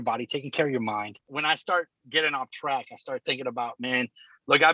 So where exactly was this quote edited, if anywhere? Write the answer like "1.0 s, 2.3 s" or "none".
1.2 s